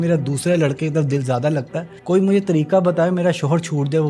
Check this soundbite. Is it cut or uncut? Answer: uncut